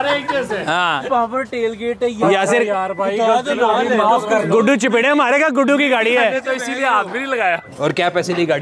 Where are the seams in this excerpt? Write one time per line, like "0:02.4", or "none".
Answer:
0:01.0
0:07.7

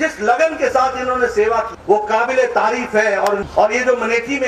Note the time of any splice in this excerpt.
0:01.7
0:03.4

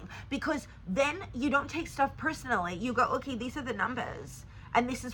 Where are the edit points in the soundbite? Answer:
none

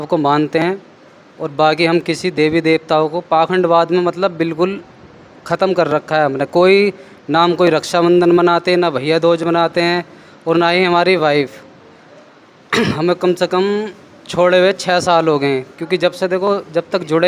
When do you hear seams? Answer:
none

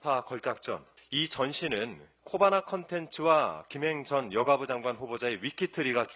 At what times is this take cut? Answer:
0:01.0

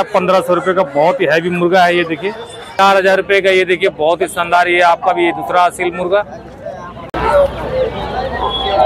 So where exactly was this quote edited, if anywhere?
0:02.8
0:06.9

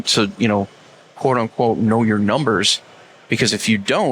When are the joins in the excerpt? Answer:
none

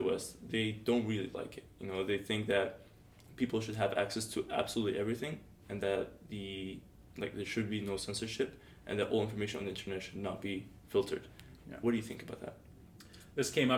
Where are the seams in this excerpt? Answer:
none

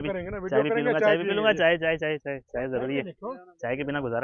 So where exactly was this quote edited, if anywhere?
none

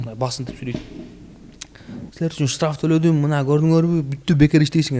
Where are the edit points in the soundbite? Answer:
none

